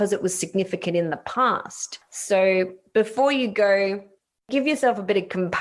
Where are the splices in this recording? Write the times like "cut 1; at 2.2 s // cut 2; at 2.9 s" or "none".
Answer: cut 1; at 4.5 s